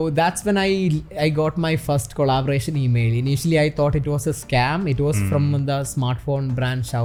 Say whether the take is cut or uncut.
uncut